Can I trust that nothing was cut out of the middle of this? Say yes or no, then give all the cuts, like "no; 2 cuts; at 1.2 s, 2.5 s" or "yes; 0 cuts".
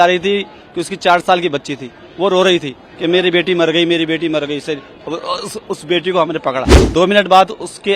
no; 1 cut; at 6.8 s